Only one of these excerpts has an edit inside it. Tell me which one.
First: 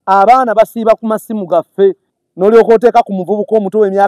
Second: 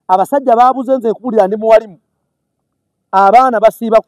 first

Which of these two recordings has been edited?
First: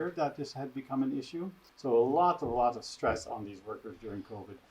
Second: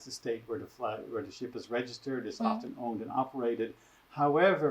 first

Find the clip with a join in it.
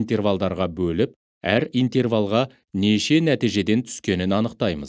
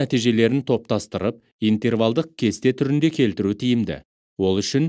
second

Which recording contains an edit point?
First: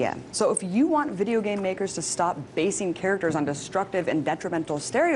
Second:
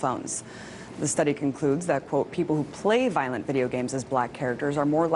first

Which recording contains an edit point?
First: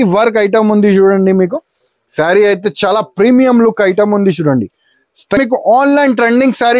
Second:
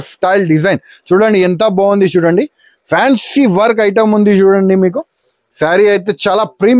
first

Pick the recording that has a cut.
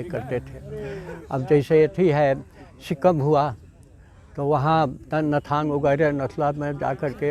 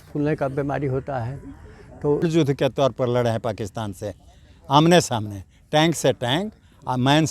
second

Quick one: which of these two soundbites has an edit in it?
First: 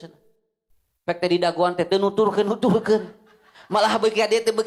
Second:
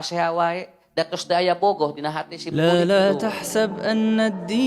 second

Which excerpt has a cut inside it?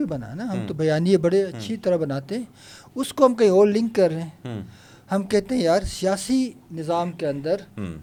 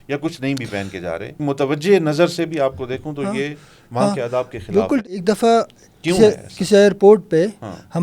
second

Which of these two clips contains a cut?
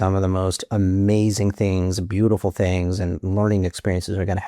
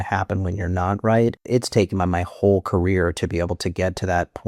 second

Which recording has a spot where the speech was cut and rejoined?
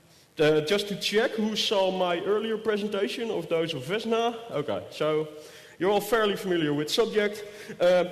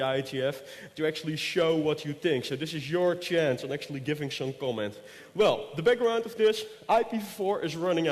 second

